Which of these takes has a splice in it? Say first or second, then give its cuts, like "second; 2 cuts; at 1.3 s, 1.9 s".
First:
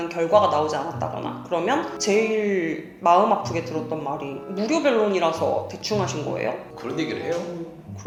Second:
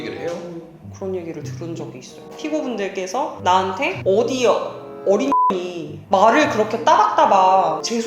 second; 1 cut; at 2.2 s